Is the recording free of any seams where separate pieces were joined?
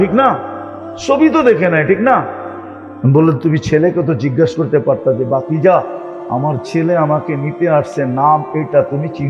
yes; 0 cuts

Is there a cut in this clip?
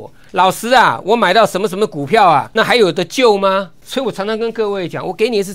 yes; 2 cuts; at 2.5 s, 3.8 s

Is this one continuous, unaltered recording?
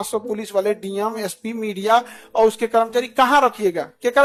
yes; 0 cuts

